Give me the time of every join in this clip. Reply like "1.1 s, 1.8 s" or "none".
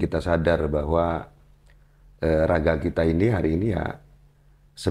none

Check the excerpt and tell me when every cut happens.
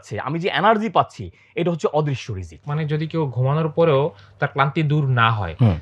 2.6 s

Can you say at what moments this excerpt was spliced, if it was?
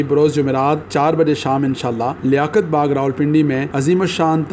0.9 s, 2.2 s, 3.7 s

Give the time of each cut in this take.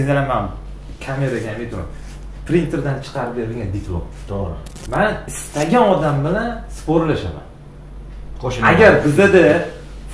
4.7 s

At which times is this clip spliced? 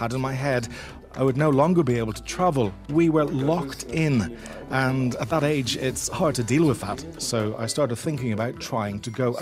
2.8 s

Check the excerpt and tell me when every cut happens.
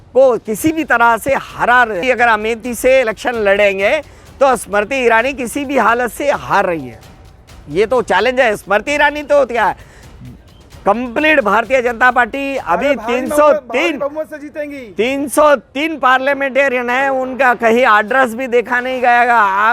2.0 s

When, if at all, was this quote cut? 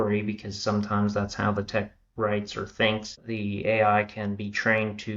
3.2 s

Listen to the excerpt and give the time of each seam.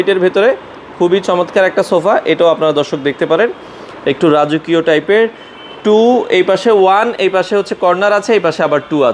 none

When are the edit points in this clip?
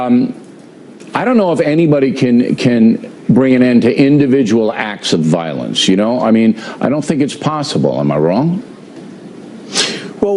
1.7 s

